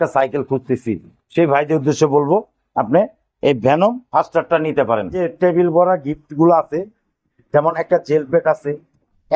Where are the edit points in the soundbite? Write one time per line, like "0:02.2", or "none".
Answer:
0:05.2